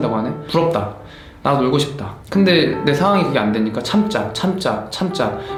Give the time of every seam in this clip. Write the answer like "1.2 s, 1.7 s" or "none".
none

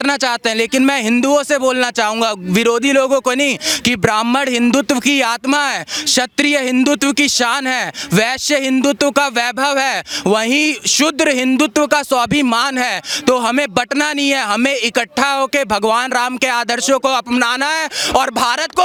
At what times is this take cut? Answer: none

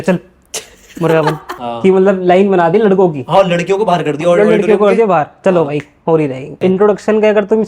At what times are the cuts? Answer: 1.5 s, 6.5 s

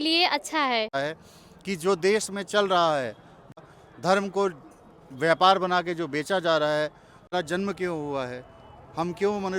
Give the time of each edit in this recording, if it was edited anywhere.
0.9 s, 3.6 s, 7.3 s

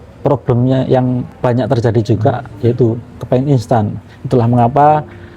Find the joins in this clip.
1.3 s

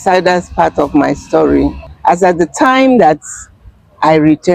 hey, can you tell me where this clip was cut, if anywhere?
1.9 s

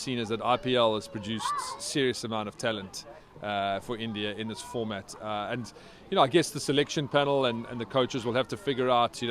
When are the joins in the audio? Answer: none

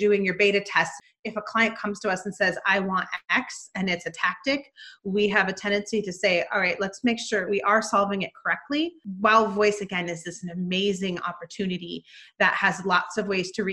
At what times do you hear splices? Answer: 0.9 s, 7.5 s, 9.0 s

